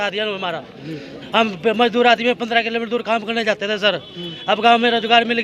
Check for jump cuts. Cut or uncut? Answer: uncut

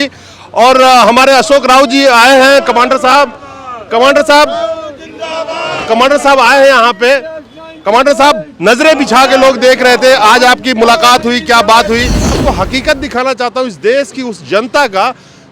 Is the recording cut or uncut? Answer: cut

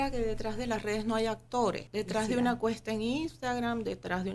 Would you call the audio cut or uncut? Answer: cut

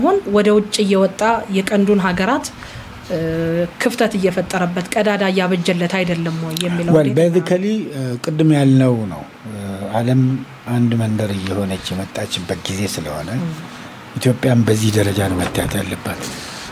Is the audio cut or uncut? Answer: uncut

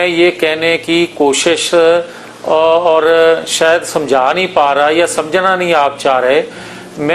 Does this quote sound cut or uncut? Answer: uncut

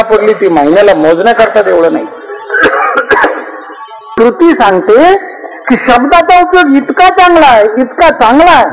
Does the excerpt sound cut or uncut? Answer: cut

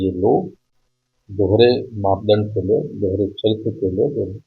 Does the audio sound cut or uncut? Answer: uncut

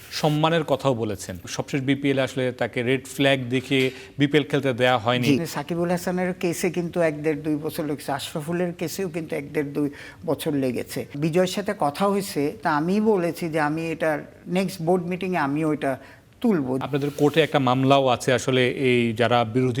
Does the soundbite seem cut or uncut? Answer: cut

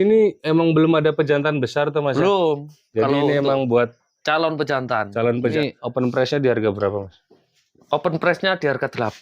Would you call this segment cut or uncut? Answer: cut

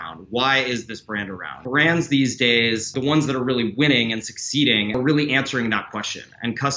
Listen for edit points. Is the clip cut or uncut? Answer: cut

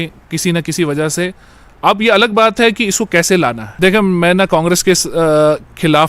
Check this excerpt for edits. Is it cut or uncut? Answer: cut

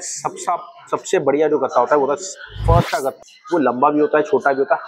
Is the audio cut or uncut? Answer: cut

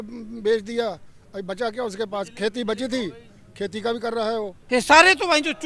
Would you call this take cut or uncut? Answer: cut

